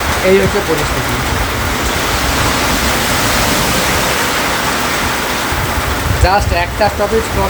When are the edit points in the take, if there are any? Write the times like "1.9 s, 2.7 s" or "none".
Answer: none